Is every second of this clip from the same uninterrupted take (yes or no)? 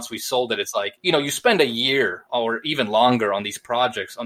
no